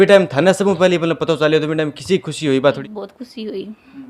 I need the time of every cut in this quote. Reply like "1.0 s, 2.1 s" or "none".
2.8 s

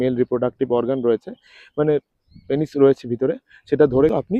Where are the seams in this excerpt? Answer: none

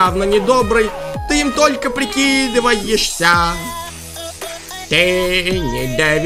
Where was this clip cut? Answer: none

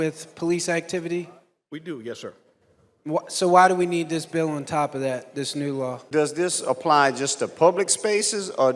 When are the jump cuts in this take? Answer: 6.0 s

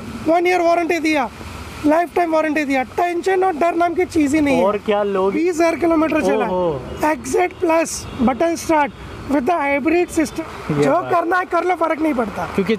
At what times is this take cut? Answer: 5.3 s, 10.3 s

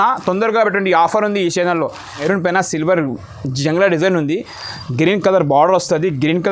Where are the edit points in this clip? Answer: 2.2 s

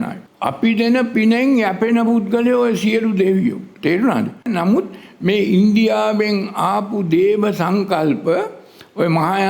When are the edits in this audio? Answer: 4.5 s

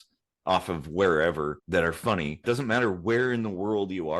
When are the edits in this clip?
1.6 s, 2.4 s

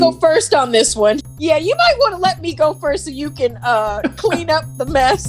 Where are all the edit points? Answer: 1.2 s

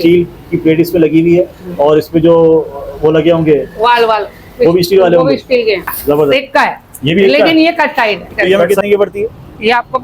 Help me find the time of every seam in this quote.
6.3 s, 8.3 s

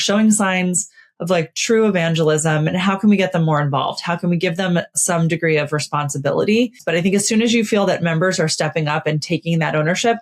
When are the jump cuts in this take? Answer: 6.8 s

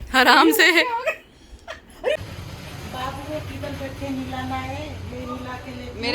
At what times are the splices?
2.2 s

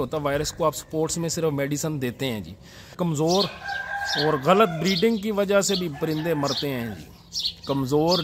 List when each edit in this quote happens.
2.9 s

